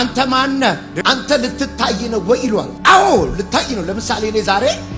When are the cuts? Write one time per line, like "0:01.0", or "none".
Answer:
0:02.7